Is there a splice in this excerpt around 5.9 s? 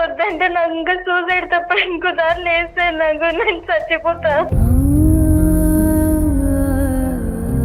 no; 1 cut; at 4.5 s

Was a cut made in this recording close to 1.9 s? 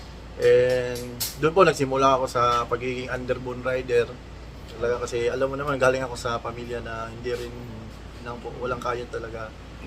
no; 2 cuts; at 4.7 s, 8.2 s

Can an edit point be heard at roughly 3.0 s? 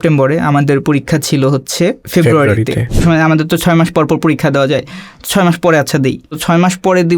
yes; 3 cuts; at 2.0 s, 3.0 s, 6.4 s

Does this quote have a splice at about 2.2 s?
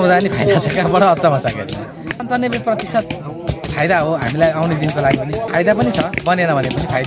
yes; 2 cuts; at 2.2 s, 5.5 s

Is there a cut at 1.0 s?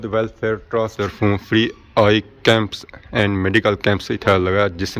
yes; 1 cut; at 1.0 s

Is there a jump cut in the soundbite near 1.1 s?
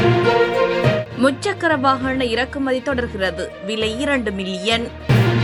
no; 0 cuts

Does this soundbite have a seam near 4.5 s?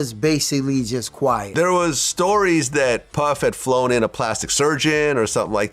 no; 1 cut; at 1.5 s

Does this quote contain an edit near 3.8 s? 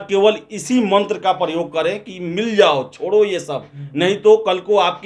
no; 0 cuts

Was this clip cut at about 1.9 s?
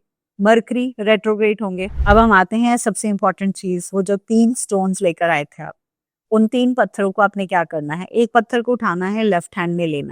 yes; 1 cut; at 1.9 s

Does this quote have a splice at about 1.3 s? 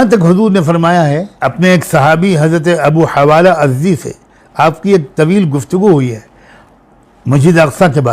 yes; 1 cut; at 1.3 s

